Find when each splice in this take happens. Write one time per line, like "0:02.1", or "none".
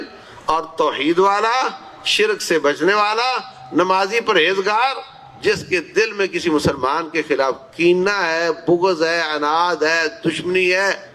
none